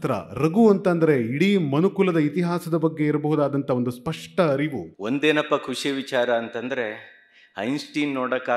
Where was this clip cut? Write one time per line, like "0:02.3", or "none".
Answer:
0:04.9